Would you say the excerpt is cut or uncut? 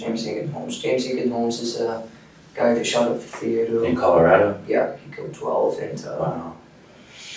uncut